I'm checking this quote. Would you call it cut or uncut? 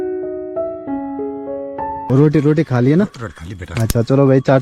cut